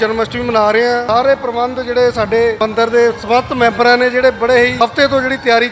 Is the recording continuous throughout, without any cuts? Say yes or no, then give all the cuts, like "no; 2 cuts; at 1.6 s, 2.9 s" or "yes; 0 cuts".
no; 3 cuts; at 1.0 s, 2.6 s, 4.7 s